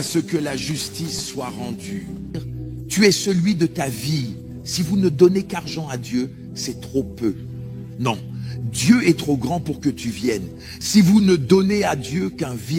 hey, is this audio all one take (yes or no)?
no